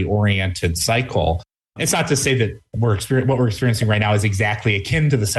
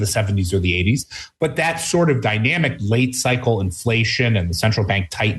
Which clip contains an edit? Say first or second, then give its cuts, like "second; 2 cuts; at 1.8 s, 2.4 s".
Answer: first; 1 cut; at 1.8 s